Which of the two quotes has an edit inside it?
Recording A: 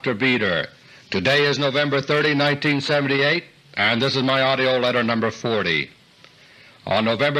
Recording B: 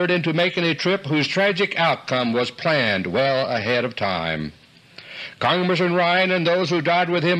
B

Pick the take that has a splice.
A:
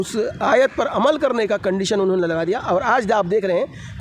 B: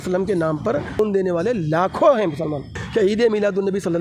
B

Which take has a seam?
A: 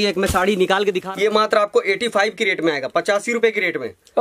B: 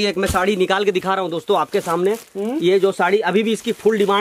A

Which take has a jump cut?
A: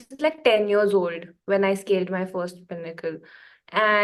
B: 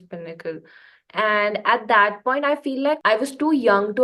B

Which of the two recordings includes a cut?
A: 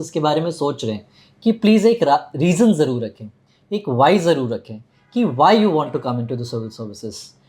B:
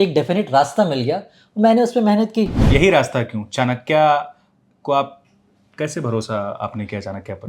B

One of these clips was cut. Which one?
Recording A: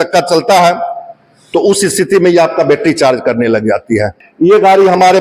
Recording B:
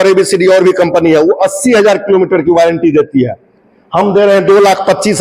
A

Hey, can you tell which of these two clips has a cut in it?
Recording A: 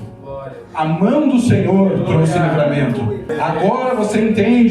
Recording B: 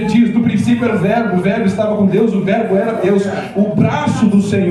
A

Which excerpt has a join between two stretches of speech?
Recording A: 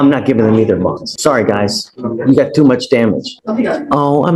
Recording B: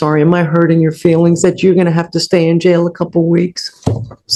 A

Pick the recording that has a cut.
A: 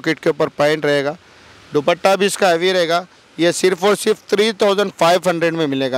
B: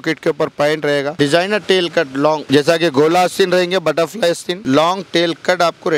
B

